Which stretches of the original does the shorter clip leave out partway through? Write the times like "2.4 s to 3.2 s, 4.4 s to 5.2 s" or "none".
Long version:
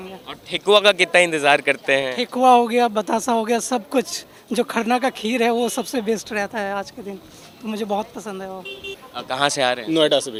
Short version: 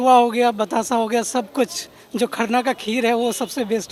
none